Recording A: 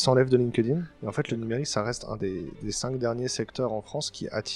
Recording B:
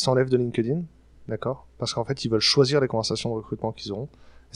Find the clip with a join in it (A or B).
A